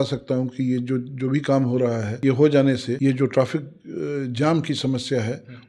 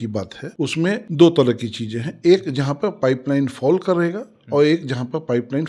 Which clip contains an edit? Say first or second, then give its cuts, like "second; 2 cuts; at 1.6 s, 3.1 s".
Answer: first; 1 cut; at 2.9 s